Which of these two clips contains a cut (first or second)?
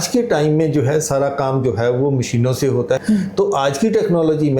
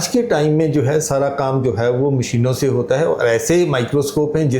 first